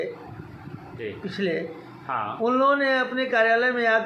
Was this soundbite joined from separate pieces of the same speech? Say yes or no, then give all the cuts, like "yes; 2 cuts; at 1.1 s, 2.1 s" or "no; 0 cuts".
no; 0 cuts